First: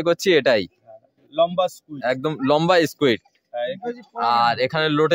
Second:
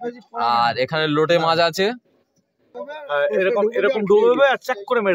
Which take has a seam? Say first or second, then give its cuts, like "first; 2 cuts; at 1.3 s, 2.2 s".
second; 1 cut; at 2.7 s